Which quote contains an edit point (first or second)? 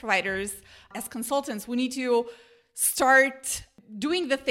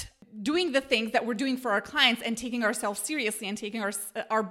first